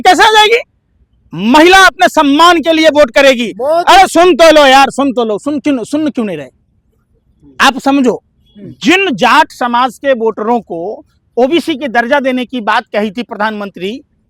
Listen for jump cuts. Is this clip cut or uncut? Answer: uncut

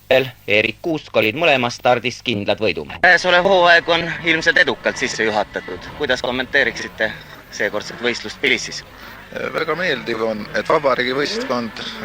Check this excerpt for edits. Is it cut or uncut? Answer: cut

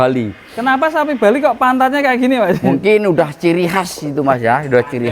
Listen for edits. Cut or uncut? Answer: uncut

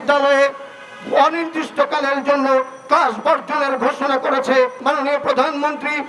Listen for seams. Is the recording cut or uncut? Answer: cut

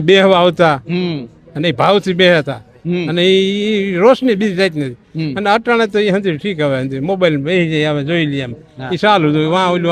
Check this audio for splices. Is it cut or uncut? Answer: uncut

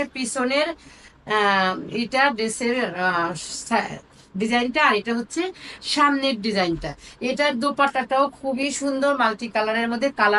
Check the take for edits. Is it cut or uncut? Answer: uncut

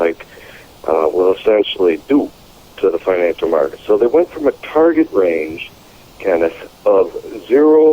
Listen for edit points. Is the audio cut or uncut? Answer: uncut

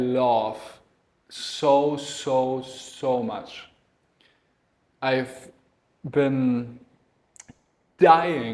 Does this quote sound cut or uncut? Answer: uncut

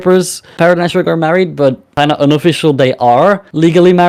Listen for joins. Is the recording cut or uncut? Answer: uncut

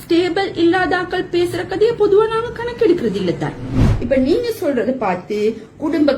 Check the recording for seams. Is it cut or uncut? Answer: cut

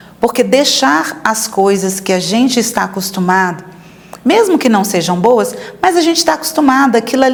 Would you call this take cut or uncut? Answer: uncut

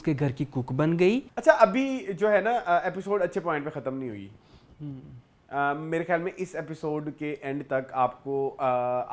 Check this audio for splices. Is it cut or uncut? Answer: cut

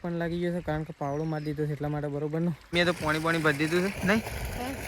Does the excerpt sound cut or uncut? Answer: cut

